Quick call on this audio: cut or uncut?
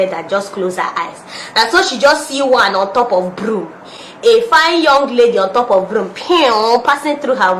uncut